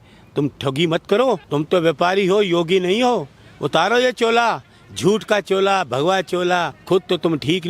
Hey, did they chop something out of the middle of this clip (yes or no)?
yes